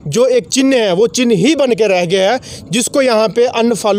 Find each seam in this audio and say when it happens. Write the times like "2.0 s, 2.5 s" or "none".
none